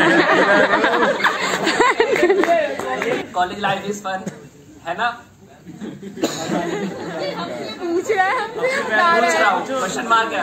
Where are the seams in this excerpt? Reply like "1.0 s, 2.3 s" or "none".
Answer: 3.2 s